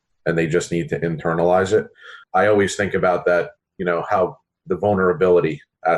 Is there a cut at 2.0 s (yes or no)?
yes